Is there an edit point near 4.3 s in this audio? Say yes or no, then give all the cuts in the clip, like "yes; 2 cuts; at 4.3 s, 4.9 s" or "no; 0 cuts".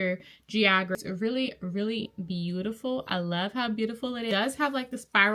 yes; 2 cuts; at 0.9 s, 4.3 s